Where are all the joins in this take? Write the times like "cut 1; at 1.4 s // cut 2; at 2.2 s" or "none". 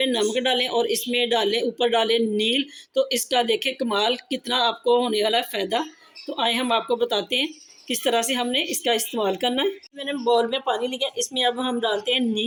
none